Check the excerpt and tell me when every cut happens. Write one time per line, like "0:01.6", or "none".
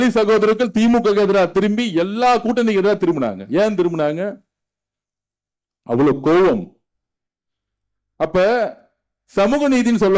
none